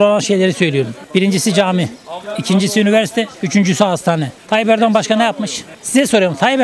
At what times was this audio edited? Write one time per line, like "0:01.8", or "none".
none